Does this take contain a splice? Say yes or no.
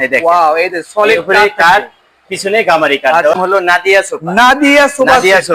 yes